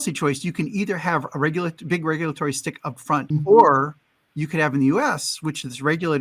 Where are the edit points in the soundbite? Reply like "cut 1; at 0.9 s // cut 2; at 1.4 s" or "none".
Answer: cut 1; at 3.3 s